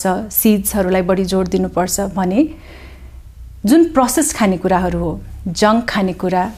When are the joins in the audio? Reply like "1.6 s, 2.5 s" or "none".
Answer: none